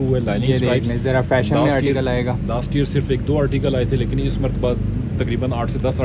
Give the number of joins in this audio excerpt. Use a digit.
0